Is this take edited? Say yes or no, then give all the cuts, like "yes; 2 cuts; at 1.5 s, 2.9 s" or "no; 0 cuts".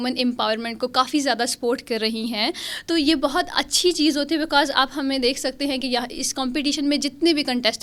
no; 0 cuts